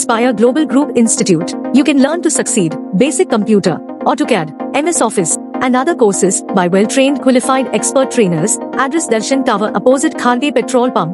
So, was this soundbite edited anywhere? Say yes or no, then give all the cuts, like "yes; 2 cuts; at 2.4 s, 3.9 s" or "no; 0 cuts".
no; 0 cuts